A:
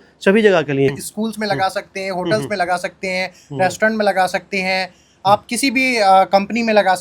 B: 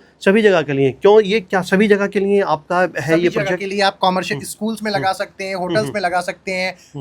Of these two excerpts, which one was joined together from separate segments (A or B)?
A